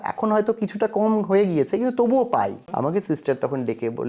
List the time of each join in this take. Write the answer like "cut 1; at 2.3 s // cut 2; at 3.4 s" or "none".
cut 1; at 2.6 s